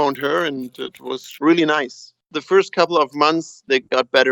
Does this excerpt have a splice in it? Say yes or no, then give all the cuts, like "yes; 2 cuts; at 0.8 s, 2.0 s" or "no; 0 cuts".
yes; 1 cut; at 2.2 s